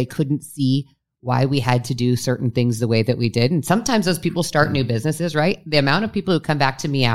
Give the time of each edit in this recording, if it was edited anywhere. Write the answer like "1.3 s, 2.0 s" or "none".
none